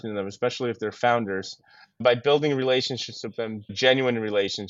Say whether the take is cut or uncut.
cut